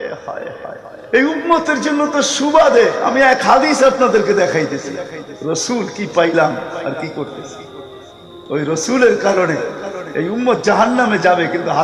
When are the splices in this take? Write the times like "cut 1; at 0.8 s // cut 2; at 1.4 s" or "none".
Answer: cut 1; at 1.1 s